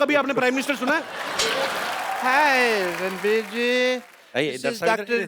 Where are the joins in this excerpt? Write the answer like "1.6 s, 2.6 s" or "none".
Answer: 1.8 s